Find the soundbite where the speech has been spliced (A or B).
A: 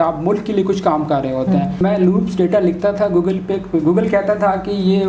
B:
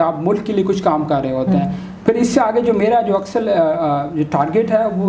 A